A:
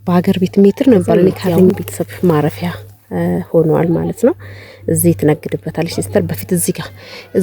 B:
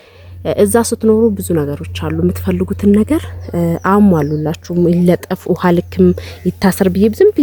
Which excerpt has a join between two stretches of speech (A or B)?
A